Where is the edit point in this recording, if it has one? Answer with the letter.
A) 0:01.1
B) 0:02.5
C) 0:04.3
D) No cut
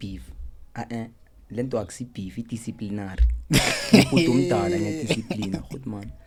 D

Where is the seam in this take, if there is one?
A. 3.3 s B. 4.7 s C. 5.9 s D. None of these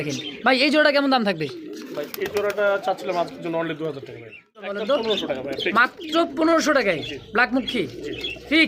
B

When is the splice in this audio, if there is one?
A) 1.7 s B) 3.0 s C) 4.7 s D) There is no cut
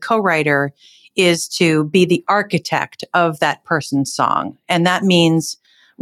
D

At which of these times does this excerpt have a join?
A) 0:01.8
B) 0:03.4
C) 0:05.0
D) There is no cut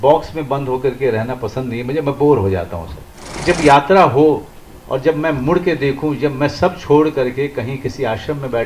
B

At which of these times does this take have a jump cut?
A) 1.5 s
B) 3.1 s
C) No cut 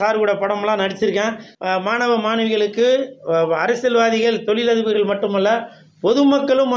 A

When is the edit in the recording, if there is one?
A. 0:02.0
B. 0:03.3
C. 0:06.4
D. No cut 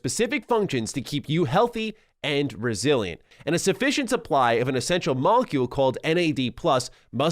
B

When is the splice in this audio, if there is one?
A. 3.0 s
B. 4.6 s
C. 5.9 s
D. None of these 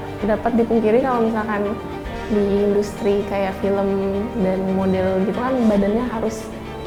D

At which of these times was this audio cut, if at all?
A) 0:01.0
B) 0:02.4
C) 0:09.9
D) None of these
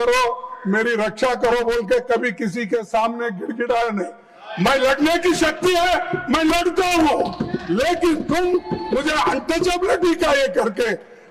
D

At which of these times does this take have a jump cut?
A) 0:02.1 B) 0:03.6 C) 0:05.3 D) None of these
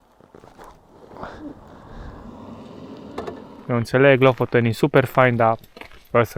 B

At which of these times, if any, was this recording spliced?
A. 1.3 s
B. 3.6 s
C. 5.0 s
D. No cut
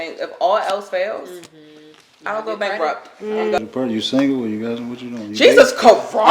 B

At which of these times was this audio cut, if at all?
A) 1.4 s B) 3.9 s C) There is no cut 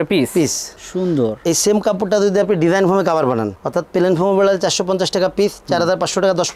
C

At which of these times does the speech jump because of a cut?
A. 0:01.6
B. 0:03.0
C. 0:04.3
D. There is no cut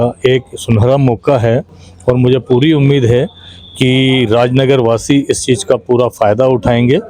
D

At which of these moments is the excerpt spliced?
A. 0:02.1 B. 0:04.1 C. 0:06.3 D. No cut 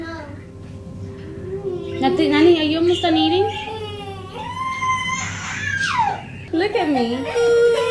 C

